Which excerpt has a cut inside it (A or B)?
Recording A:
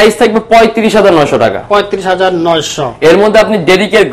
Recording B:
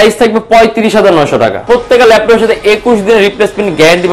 B